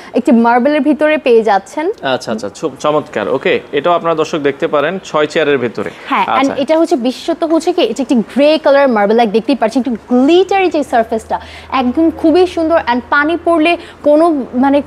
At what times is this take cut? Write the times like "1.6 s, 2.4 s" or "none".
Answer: none